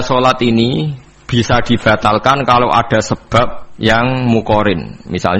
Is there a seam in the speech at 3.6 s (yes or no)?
yes